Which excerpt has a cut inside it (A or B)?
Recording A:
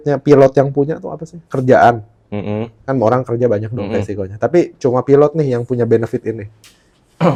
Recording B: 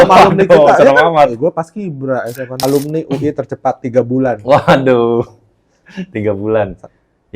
B